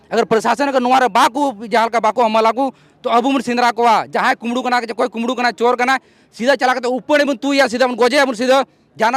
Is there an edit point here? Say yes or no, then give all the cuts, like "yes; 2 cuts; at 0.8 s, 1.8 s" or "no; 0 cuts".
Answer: no; 0 cuts